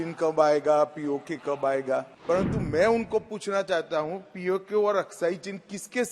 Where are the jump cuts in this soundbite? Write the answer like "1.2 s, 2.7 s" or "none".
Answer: 2.1 s